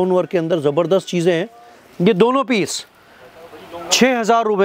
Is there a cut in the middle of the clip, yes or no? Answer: no